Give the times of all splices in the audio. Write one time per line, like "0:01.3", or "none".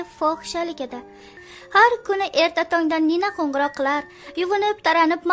0:01.2